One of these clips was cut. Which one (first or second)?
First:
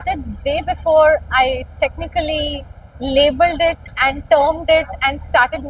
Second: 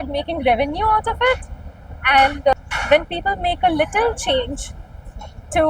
second